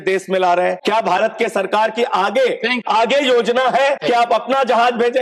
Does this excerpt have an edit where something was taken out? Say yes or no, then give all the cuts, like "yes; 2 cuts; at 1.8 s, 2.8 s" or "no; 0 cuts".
yes; 3 cuts; at 0.8 s, 2.8 s, 4.0 s